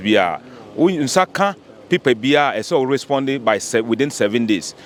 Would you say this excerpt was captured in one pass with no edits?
yes; 0 cuts

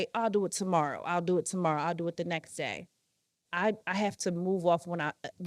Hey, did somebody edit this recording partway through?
yes; 1 cut; at 3.4 s

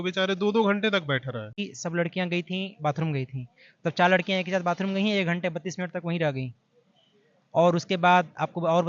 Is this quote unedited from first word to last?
no; 1 cut; at 1.6 s

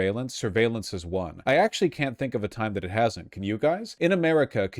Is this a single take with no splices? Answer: no; 2 cuts; at 1.3 s, 3.9 s

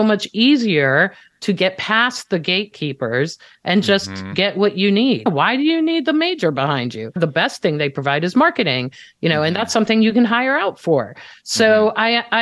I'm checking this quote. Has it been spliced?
yes; 2 cuts; at 5.2 s, 7.2 s

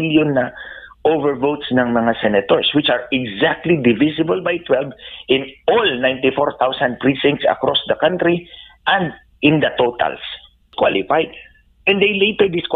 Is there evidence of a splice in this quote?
yes; 1 cut; at 10.6 s

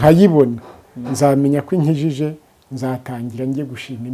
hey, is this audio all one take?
yes; 0 cuts

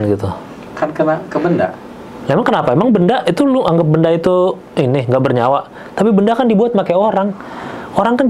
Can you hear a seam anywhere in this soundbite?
no; 0 cuts

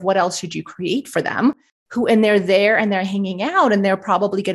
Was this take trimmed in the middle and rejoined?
yes; 1 cut; at 1.6 s

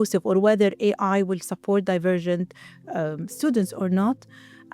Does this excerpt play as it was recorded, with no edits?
yes; 0 cuts

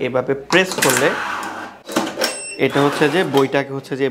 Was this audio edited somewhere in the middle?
yes; 1 cut; at 1.7 s

